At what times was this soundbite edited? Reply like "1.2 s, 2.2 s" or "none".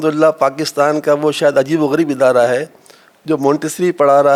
none